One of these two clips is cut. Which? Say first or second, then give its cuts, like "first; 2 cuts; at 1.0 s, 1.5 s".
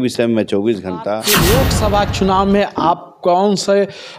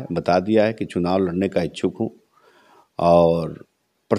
first; 1 cut; at 1.3 s